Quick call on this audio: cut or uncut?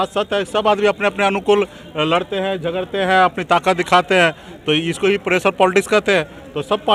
uncut